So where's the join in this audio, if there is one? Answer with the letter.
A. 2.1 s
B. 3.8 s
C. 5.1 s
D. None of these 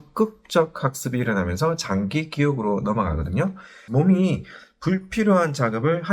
B